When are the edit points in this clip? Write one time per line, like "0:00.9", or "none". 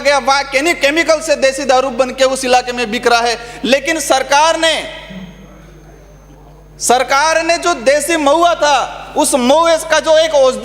none